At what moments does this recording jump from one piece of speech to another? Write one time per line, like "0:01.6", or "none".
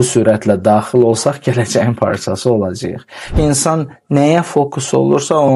0:03.3